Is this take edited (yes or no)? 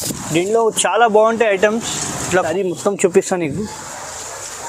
yes